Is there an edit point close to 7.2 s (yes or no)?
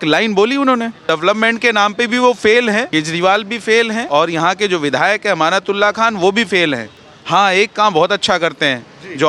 no